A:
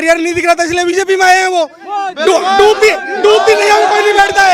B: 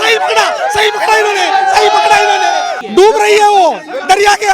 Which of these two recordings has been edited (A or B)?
B